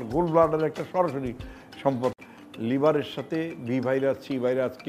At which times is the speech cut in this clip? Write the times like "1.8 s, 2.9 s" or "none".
2.3 s

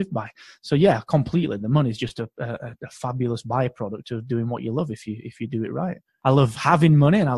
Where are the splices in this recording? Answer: 6.1 s

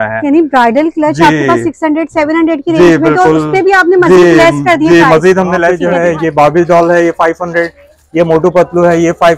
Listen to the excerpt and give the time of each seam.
5.8 s

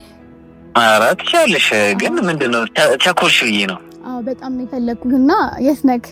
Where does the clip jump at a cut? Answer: none

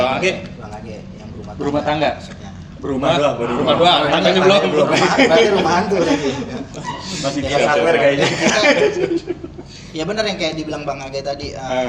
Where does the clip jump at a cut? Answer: none

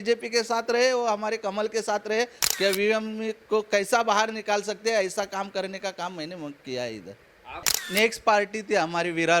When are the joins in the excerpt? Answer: 2.4 s, 7.7 s

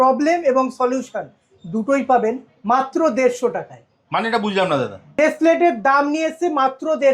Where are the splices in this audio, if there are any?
5.2 s

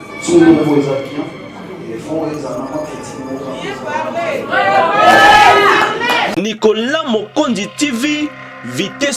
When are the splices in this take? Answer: 6.3 s

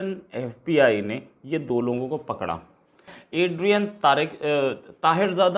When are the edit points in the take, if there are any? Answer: 3.2 s

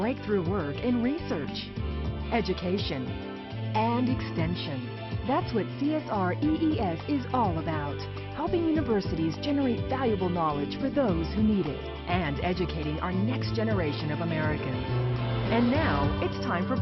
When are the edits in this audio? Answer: 11.6 s

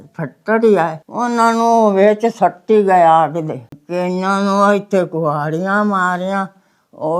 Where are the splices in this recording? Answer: 3.7 s

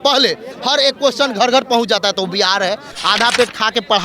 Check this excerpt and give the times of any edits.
2.9 s

